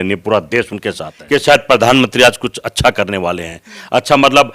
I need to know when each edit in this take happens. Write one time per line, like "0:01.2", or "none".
0:01.2